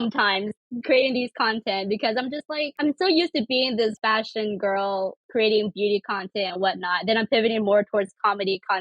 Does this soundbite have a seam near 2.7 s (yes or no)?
yes